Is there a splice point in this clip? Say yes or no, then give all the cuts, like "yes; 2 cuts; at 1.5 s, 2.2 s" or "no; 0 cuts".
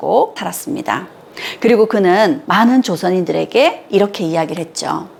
no; 0 cuts